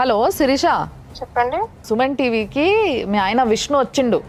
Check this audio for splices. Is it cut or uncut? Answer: uncut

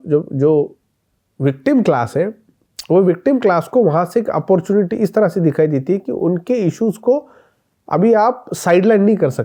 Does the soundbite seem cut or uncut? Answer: uncut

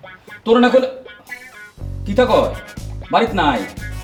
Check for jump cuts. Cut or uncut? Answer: uncut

